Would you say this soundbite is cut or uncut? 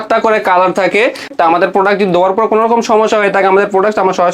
cut